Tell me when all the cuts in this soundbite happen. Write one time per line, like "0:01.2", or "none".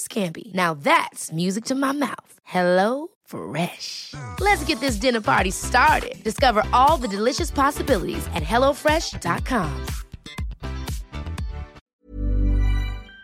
0:12.0